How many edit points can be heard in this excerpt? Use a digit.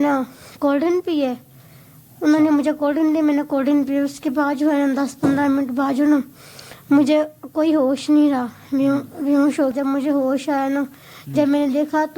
1